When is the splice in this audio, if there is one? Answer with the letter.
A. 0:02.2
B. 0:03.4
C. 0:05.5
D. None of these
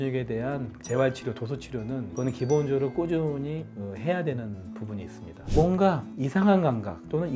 C